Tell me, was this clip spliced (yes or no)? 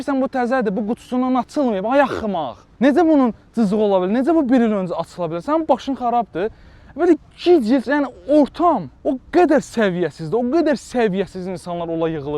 no